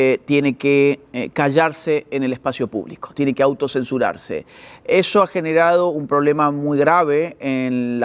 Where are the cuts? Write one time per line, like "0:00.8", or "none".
none

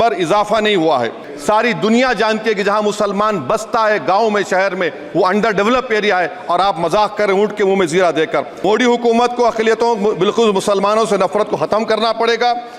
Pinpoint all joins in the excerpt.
0:01.3
0:08.5

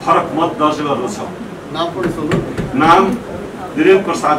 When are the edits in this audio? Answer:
none

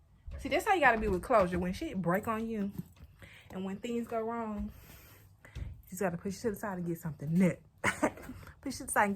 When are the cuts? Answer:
none

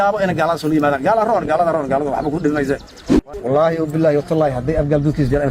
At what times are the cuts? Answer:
0:03.0

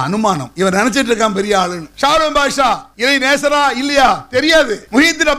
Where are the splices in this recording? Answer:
0:01.8
0:02.9

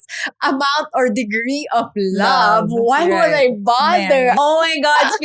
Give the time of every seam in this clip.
0:04.4

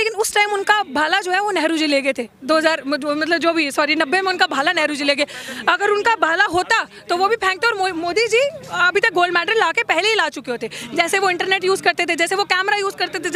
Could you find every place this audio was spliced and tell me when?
none

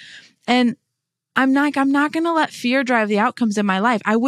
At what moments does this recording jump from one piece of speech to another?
none

